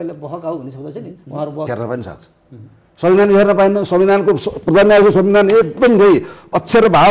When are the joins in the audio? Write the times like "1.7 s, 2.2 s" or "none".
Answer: 1.7 s